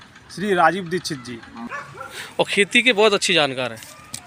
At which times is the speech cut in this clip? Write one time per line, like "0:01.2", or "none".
0:01.6